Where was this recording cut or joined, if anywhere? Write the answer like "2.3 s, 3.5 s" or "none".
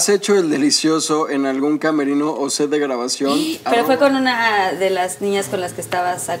3.6 s